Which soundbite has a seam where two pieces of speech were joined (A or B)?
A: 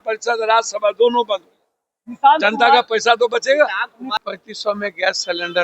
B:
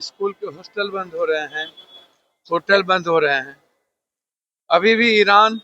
A